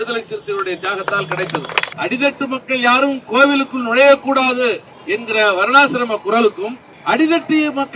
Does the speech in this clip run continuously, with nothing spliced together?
no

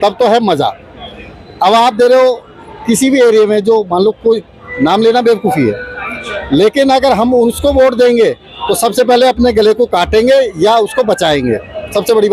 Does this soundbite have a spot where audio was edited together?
no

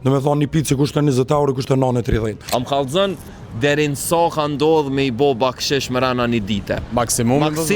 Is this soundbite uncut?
no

